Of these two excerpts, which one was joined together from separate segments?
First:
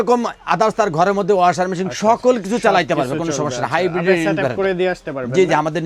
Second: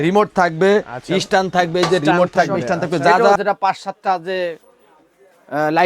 second; 1 cut; at 3.4 s

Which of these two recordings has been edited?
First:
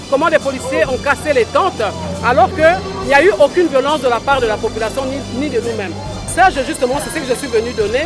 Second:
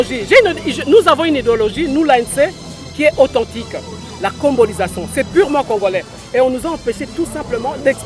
first; 1 cut; at 6.3 s

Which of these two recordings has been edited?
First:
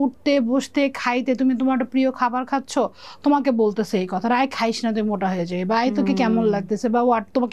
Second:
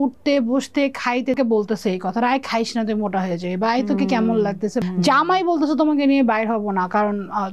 second; 2 cuts; at 1.4 s, 4.8 s

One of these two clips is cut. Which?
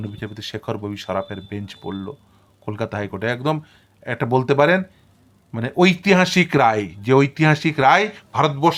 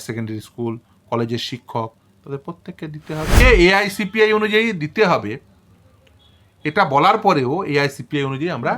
second; 1 cut; at 3.4 s

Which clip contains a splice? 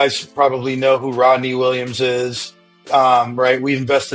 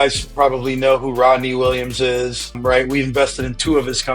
second; 1 cut; at 2.6 s

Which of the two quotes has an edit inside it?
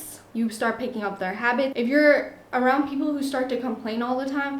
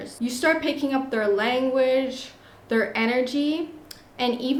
first; 1 cut; at 1.7 s

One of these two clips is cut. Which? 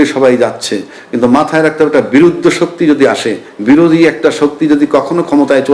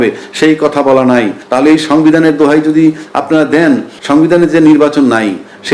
second; 2 cuts; at 1.4 s, 3.9 s

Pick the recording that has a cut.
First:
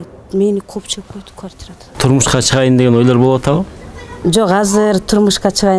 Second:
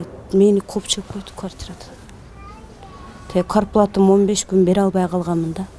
first; 1 cut; at 1.8 s

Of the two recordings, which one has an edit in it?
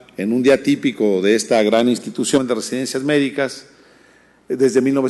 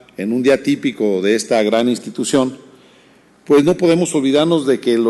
second; 1 cut; at 2.4 s

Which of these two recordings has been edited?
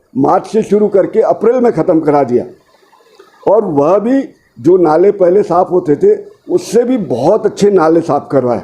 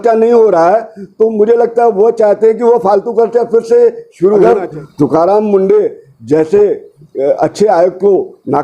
second; 1 cut; at 4.4 s

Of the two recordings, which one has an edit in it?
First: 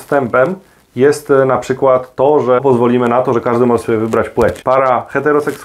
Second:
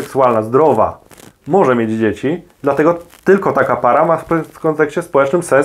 first; 2 cuts; at 2.6 s, 4.6 s

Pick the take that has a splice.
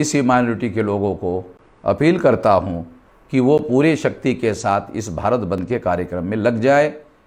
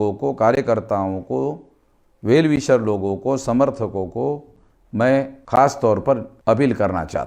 second; 2 cuts; at 5.4 s, 6.3 s

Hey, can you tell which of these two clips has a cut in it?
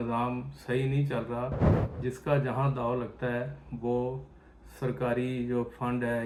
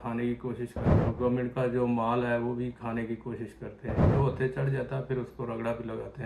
second; 2 cuts; at 0.9 s, 4.1 s

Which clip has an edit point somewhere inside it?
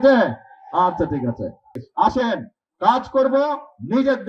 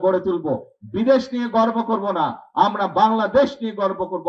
first; 1 cut; at 1.8 s

